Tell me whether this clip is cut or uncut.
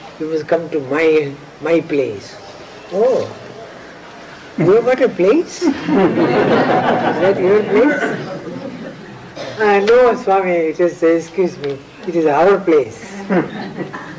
uncut